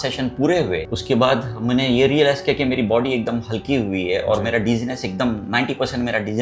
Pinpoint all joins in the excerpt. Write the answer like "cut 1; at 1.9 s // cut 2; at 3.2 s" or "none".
cut 1; at 0.9 s